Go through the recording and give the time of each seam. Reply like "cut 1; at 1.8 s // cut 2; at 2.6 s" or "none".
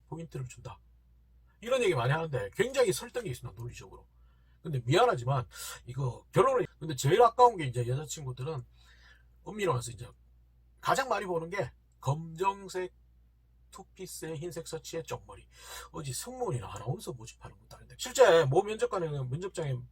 cut 1; at 6.7 s // cut 2; at 17.9 s